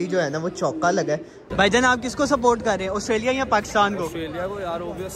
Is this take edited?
yes; 1 cut; at 1.4 s

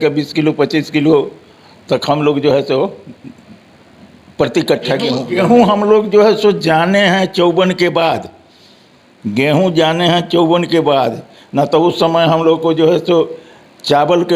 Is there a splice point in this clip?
yes; 1 cut; at 5.2 s

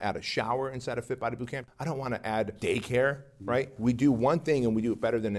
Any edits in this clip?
yes; 3 cuts; at 1.6 s, 2.5 s, 3.7 s

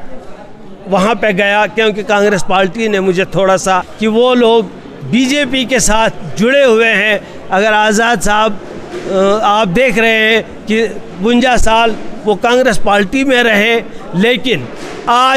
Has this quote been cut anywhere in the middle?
yes; 1 cut; at 3.9 s

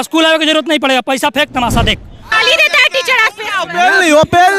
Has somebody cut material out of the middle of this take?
yes; 1 cut; at 2.3 s

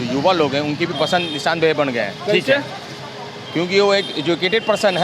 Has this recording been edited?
no; 0 cuts

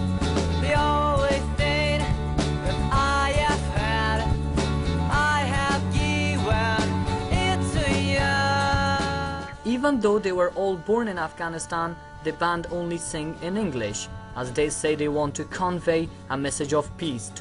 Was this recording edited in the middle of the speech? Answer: yes; 1 cut; at 7.0 s

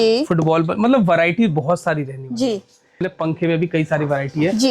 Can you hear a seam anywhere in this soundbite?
yes; 1 cut; at 3.0 s

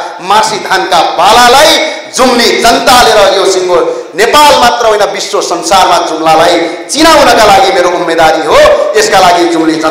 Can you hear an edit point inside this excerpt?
no; 0 cuts

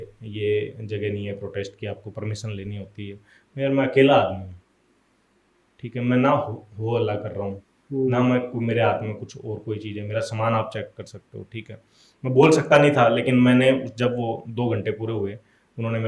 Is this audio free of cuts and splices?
yes; 0 cuts

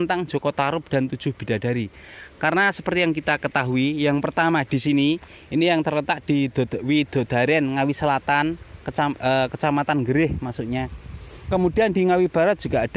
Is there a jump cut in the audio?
no; 0 cuts

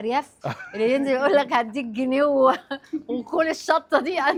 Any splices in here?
no; 0 cuts

